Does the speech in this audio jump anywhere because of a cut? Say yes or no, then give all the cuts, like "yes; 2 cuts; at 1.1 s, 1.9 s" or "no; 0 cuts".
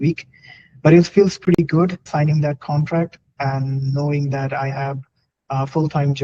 yes; 1 cut; at 2.1 s